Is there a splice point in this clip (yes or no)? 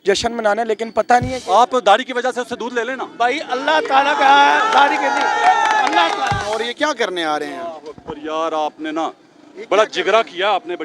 yes